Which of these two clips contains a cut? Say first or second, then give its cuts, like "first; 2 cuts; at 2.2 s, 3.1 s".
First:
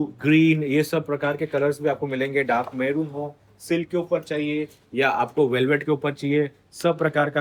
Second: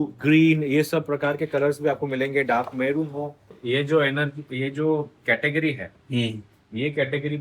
second; 1 cut; at 3.6 s